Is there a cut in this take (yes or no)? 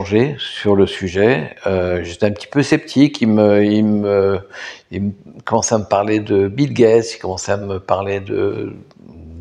no